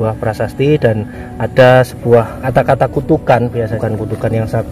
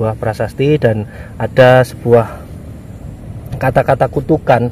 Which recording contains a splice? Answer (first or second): first